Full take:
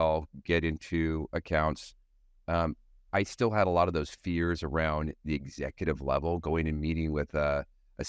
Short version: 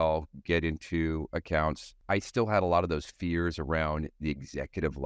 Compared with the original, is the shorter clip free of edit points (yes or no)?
no